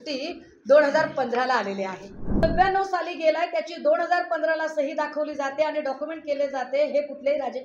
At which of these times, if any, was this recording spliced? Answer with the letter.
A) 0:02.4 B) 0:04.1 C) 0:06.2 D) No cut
A